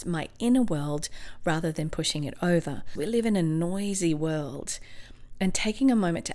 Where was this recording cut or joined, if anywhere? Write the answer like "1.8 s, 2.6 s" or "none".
2.9 s